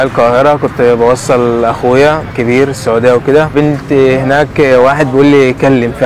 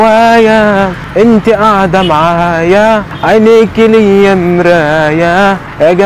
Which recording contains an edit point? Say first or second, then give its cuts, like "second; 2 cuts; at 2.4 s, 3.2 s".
first; 2 cuts; at 2.3 s, 3.5 s